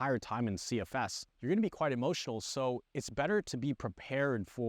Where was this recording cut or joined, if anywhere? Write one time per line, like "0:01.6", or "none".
0:01.3